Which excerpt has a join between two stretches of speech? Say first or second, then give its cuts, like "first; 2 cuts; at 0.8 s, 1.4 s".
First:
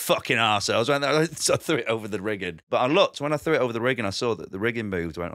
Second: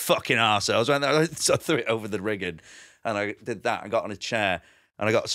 first; 1 cut; at 2.6 s